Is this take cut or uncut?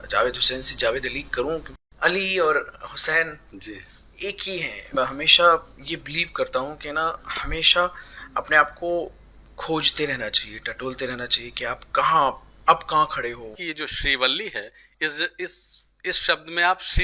cut